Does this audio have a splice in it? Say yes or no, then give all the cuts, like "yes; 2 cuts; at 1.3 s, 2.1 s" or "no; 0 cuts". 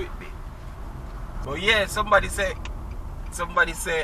yes; 1 cut; at 1.4 s